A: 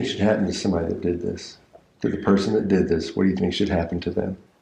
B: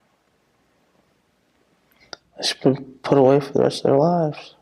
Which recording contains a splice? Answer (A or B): A